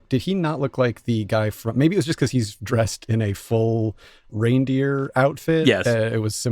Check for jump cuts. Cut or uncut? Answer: cut